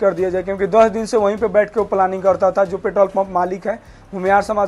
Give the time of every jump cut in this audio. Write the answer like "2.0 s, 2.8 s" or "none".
none